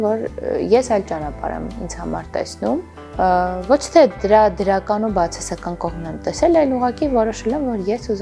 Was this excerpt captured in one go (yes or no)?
yes